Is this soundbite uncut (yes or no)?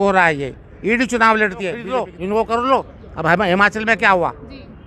no